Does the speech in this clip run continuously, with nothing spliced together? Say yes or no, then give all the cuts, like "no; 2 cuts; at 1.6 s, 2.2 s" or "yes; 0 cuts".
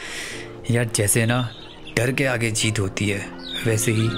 yes; 0 cuts